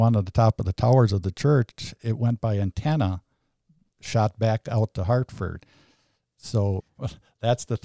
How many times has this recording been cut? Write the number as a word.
one